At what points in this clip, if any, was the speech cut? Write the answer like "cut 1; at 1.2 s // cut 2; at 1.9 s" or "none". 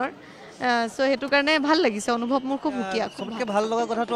cut 1; at 3.2 s